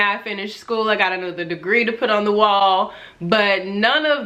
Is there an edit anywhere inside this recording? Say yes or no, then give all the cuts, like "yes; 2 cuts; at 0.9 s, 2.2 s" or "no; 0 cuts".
no; 0 cuts